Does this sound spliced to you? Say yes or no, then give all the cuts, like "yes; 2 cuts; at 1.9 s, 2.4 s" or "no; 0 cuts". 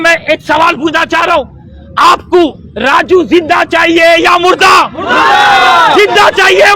no; 0 cuts